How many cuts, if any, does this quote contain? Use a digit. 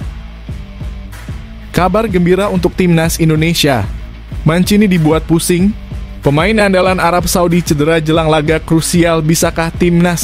1